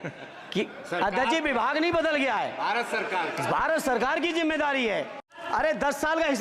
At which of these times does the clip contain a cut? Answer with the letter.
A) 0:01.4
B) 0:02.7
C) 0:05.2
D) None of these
C